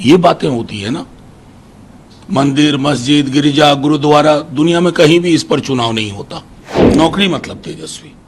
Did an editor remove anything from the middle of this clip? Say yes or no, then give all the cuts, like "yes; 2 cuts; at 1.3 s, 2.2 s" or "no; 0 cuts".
yes; 1 cut; at 6.9 s